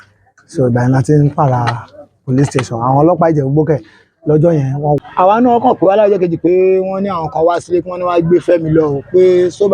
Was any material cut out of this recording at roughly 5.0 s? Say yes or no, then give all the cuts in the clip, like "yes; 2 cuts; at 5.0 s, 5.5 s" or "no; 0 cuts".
yes; 1 cut; at 5.0 s